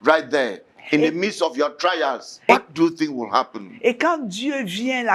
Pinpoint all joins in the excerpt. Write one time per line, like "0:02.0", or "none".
0:02.4